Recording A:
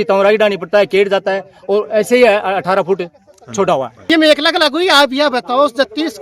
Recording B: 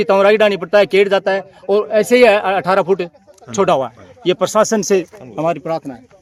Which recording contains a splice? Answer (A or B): A